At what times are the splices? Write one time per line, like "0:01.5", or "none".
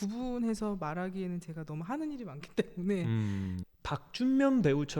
0:03.6